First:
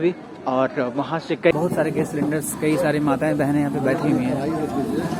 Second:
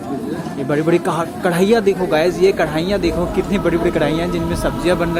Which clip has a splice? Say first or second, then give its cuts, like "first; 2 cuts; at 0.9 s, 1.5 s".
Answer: first; 1 cut; at 1.5 s